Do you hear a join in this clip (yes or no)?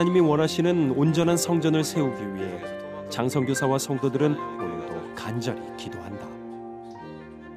no